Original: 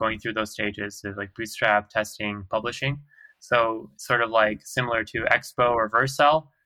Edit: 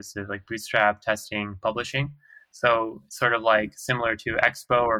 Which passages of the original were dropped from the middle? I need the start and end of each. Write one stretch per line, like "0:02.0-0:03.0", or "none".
none